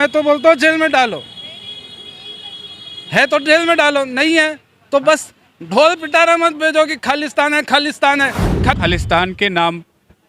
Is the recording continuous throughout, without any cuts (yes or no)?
no